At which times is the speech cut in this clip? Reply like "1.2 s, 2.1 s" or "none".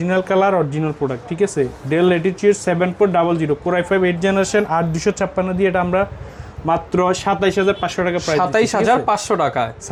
none